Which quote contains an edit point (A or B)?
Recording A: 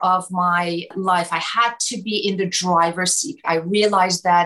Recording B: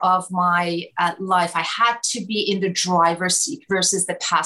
A